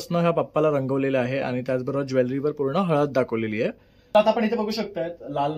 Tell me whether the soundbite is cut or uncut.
cut